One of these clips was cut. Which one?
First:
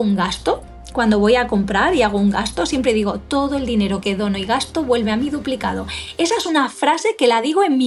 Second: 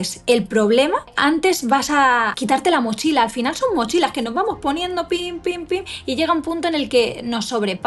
second; 2 cuts; at 1.1 s, 2.3 s

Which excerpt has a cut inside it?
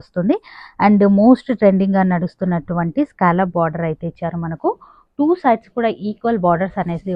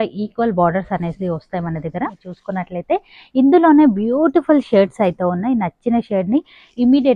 second; 1 cut; at 2.3 s

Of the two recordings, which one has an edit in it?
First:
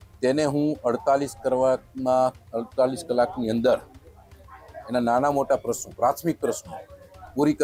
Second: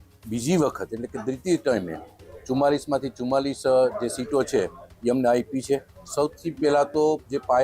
second; 1 cut; at 6.0 s

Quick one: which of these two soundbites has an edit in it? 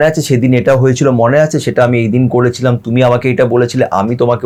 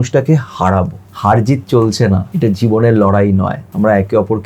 second; 3 cuts; at 1.0 s, 2.3 s, 3.6 s

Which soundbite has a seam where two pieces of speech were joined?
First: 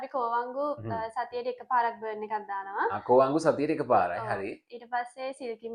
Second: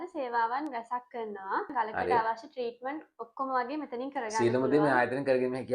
second; 1 cut; at 1.7 s

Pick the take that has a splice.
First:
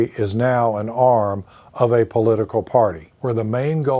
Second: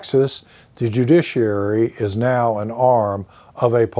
first; 1 cut; at 3.1 s

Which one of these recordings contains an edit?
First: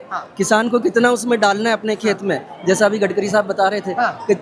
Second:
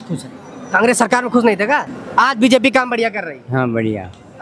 second; 1 cut; at 2.0 s

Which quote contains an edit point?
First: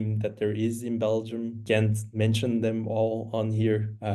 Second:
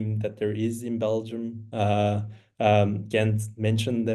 first; 1 cut; at 1.6 s

